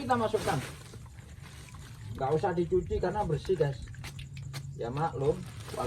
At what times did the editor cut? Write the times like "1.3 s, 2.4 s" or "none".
none